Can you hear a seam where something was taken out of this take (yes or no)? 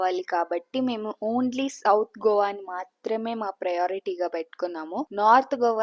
no